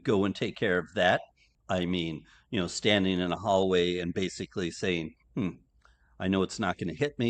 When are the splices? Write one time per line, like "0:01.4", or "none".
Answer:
0:01.5